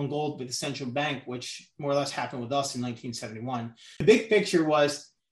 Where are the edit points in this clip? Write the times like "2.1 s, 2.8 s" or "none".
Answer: 4.0 s

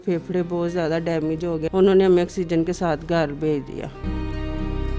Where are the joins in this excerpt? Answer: 1.7 s, 4.0 s

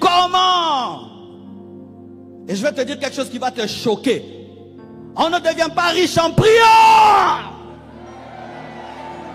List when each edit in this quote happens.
none

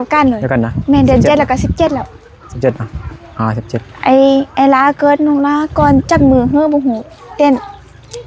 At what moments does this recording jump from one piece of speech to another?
none

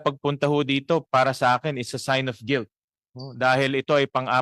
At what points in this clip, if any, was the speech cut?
none

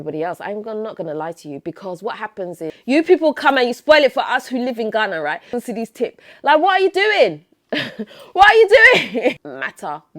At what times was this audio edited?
2.8 s, 5.5 s, 9.4 s

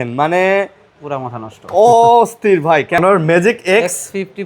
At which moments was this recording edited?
3.0 s

